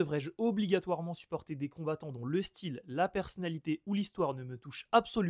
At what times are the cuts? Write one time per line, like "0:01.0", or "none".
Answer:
none